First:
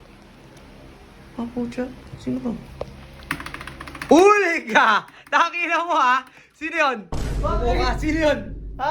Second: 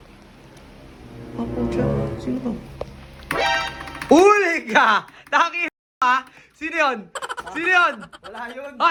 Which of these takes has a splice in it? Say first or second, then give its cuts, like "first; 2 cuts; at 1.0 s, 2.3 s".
first; 1 cut; at 7.2 s